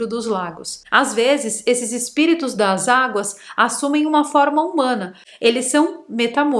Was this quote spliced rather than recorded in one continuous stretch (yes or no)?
yes